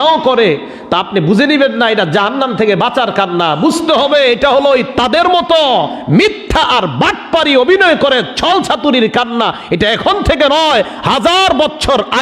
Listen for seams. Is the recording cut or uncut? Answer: uncut